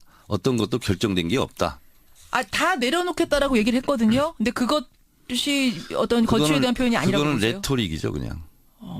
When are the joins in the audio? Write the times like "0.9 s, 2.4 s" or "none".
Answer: 5.3 s